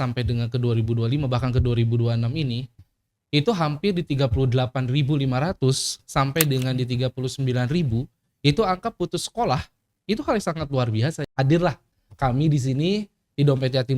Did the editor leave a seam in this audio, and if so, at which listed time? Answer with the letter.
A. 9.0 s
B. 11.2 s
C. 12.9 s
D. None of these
B